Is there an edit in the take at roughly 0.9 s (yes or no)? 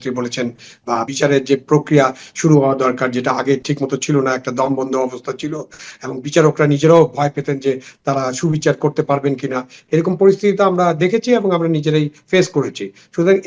yes